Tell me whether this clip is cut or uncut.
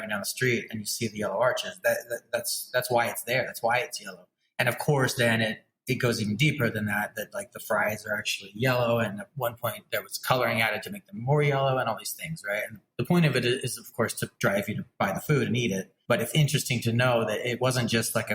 cut